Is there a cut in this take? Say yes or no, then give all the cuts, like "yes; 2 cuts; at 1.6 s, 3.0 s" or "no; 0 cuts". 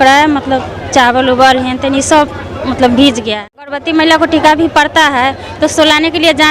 yes; 1 cut; at 3.8 s